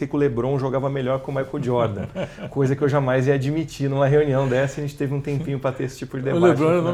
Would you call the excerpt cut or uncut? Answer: uncut